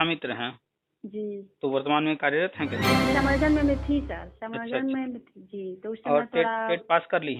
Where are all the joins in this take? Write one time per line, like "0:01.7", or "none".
0:03.0

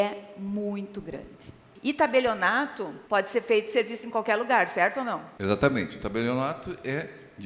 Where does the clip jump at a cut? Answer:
0:01.6

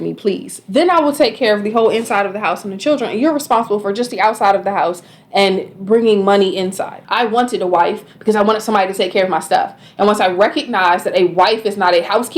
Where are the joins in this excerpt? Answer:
0:07.0

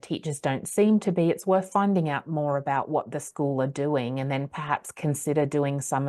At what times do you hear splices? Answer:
none

